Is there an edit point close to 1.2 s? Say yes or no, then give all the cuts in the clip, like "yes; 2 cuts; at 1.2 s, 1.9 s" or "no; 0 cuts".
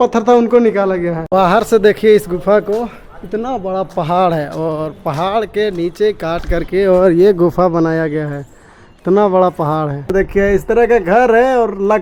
yes; 2 cuts; at 1.2 s, 10.1 s